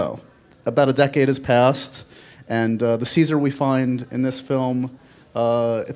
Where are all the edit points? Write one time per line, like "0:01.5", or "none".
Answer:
0:01.4